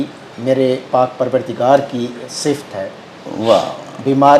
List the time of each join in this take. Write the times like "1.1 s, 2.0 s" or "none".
none